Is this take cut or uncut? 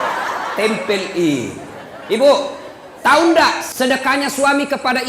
cut